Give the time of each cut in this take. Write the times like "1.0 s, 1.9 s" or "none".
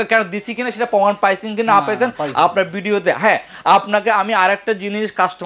none